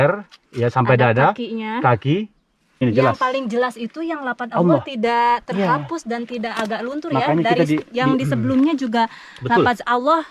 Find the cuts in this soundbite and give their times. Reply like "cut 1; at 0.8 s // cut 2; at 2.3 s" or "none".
cut 1; at 2.8 s